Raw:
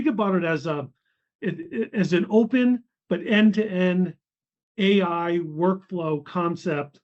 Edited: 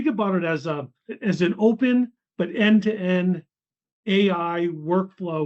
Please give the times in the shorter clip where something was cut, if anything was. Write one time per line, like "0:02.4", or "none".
0:01.0